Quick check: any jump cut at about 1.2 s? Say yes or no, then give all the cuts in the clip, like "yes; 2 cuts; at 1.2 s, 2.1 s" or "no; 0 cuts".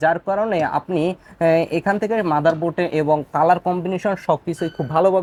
no; 0 cuts